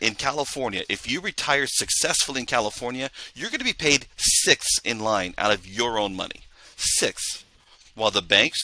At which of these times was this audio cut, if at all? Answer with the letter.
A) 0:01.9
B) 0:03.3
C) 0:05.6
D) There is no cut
D